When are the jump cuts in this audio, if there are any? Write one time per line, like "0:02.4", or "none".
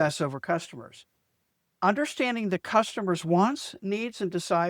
0:01.5